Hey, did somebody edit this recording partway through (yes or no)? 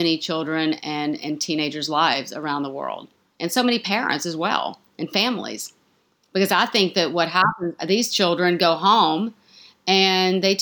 no